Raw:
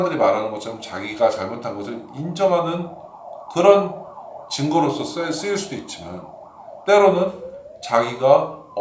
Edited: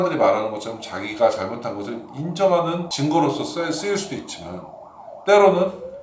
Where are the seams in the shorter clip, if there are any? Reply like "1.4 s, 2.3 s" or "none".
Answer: 2.9 s